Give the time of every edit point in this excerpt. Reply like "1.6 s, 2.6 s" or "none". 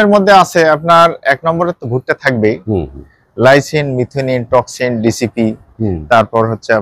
none